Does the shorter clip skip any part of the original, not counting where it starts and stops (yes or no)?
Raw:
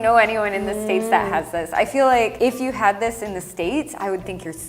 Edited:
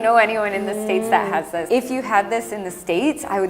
yes